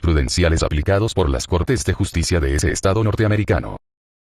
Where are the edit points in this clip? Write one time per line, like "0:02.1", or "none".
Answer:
0:02.4